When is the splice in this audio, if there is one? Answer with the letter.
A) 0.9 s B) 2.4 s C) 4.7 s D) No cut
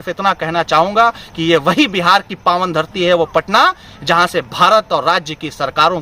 D